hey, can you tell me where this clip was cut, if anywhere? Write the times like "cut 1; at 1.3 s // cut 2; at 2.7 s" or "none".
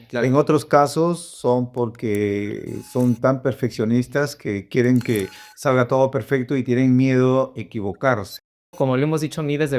cut 1; at 8.7 s